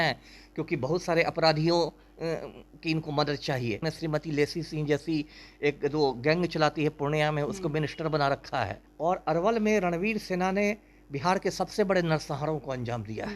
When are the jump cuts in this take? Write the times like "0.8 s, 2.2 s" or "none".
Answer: 3.8 s, 8.8 s